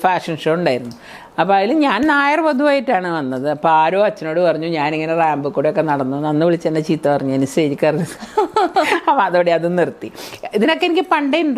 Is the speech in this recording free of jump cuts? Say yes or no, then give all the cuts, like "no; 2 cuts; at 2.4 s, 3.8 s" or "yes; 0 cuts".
yes; 0 cuts